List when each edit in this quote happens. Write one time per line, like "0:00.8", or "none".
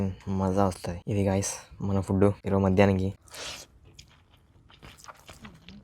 0:00.9
0:02.4
0:03.3